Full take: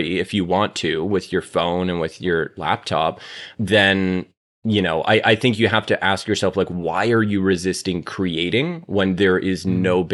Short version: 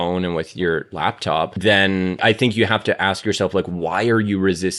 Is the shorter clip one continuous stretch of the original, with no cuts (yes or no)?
no